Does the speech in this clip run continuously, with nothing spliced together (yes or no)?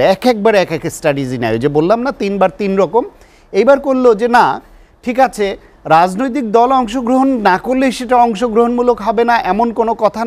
yes